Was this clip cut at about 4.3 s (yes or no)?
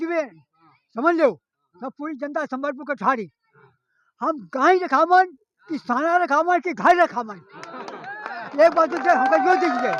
no